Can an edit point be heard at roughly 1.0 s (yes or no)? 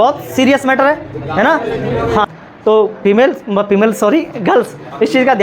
no